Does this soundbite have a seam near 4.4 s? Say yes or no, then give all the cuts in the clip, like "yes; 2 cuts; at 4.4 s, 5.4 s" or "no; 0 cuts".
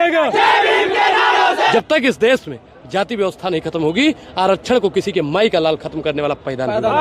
no; 1 cut; at 1.7 s